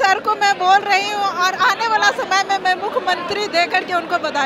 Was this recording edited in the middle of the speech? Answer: no; 0 cuts

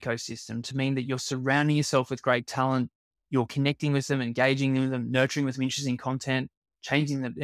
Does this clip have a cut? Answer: no; 0 cuts

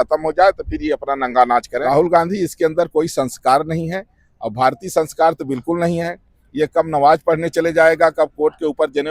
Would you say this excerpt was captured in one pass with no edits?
no; 1 cut; at 1.7 s

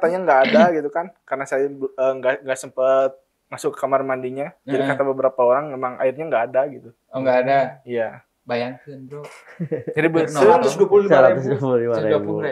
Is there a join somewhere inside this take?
no; 0 cuts

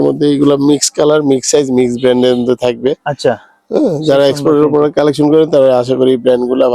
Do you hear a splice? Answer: no; 0 cuts

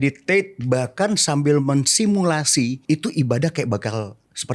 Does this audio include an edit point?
yes; 1 cut; at 2.8 s

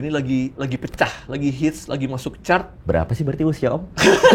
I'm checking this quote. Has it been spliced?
yes; 1 cut; at 2.7 s

